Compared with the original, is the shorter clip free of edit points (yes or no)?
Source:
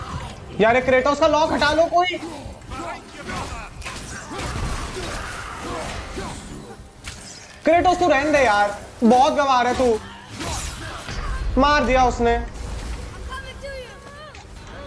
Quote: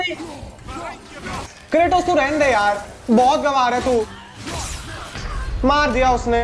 no